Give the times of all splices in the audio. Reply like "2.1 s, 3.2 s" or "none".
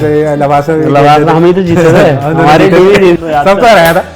3.2 s

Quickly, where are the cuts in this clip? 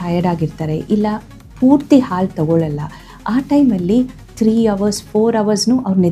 none

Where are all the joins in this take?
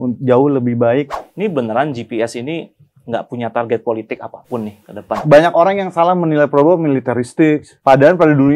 1.2 s, 5.2 s

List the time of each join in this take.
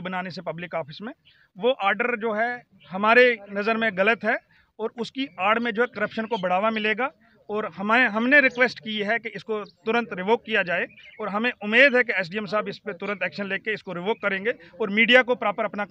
none

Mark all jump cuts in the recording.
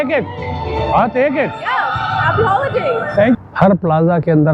3.4 s

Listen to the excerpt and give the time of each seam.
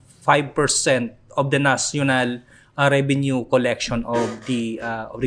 none

